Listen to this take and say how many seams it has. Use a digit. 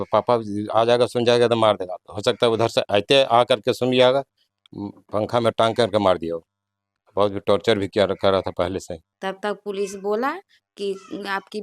1